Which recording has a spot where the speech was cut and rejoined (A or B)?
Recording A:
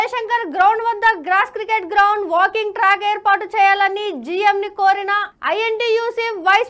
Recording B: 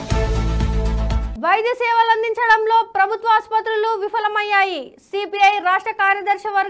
B